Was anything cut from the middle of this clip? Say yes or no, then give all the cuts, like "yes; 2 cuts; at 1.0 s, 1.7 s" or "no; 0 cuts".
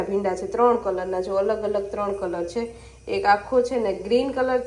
no; 0 cuts